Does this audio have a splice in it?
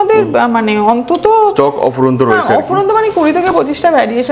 no; 0 cuts

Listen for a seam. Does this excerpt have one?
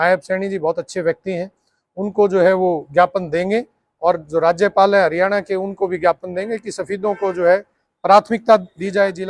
no; 0 cuts

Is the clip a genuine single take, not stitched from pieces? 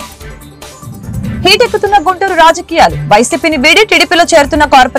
yes; 0 cuts

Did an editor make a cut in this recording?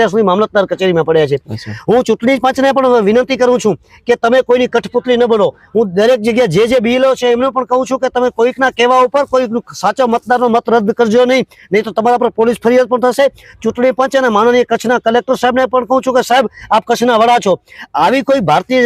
no; 0 cuts

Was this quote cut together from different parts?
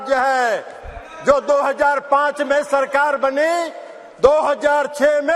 no; 0 cuts

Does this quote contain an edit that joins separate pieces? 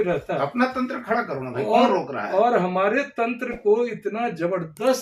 no; 0 cuts

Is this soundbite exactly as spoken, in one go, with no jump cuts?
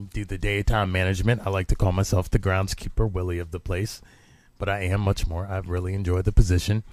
no; 1 cut; at 1.9 s

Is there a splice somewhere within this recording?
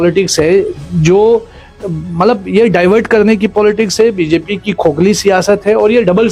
no; 0 cuts

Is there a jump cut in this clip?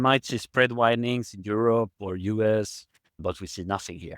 yes; 1 cut; at 3.2 s

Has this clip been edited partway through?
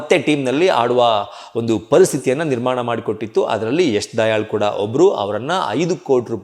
no; 0 cuts

